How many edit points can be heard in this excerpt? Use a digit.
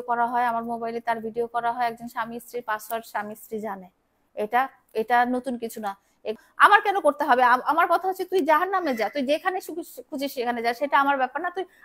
1